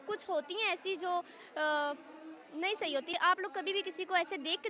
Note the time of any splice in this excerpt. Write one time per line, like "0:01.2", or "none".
0:03.1